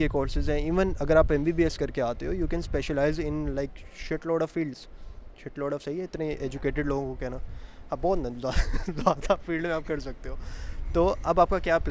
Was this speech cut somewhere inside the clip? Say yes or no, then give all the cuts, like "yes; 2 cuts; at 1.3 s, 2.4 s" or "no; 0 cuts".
no; 0 cuts